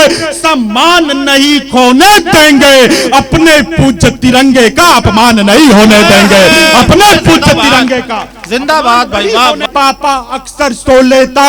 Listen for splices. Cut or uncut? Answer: cut